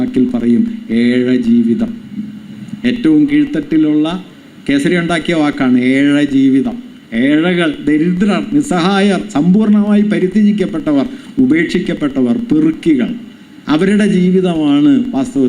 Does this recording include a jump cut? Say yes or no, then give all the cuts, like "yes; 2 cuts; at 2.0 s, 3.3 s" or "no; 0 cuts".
no; 0 cuts